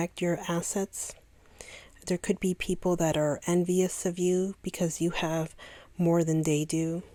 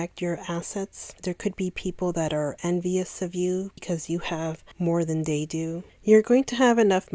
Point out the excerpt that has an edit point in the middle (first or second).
second